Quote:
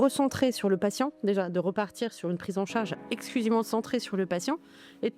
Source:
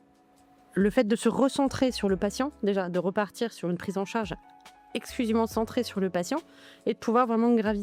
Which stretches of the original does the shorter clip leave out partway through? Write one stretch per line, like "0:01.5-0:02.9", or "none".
0:04.4-0:04.8